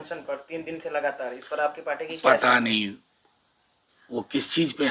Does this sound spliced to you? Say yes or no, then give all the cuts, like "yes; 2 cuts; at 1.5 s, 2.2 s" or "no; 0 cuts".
no; 0 cuts